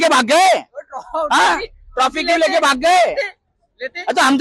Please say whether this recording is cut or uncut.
uncut